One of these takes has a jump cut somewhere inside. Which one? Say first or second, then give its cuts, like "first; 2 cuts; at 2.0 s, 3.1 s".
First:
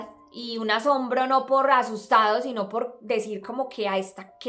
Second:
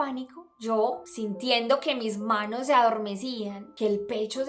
second; 2 cuts; at 1.1 s, 3.6 s